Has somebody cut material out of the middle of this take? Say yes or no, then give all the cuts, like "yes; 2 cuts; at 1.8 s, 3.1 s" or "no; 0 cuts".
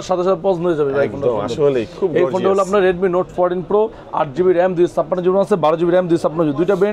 no; 0 cuts